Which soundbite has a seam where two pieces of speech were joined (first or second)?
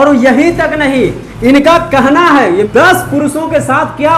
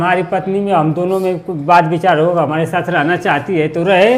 first